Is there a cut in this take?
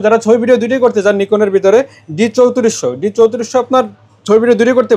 no; 0 cuts

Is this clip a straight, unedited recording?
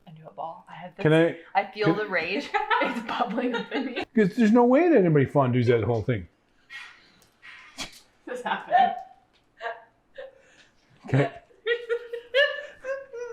yes; 0 cuts

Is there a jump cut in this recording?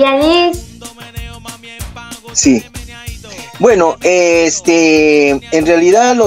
no; 0 cuts

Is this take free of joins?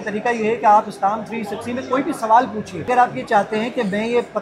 no; 1 cut; at 2.9 s

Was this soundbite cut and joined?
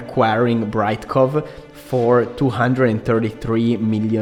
no; 0 cuts

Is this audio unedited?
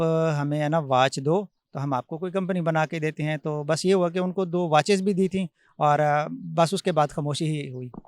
yes; 0 cuts

